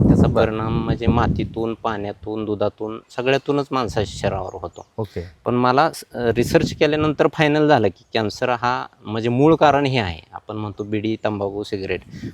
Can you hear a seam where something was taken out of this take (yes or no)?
no